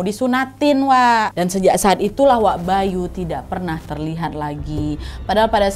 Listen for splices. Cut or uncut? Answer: cut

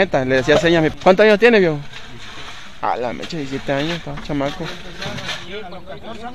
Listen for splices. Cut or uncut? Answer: cut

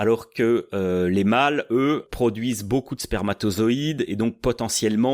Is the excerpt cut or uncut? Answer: cut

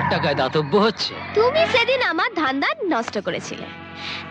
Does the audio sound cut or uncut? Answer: cut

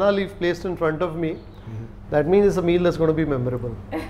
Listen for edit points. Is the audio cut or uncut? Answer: uncut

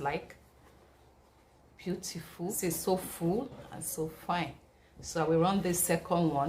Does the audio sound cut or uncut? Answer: cut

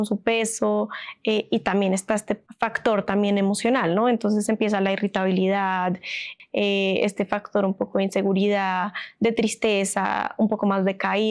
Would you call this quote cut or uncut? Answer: cut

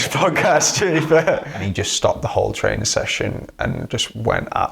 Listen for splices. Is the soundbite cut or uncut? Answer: cut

